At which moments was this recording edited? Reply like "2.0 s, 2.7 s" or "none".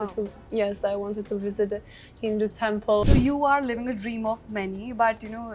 3.0 s